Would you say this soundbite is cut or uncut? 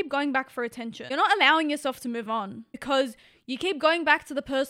cut